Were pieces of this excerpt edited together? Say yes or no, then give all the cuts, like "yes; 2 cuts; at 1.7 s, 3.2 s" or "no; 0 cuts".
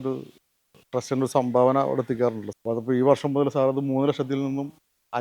yes; 1 cut; at 2.5 s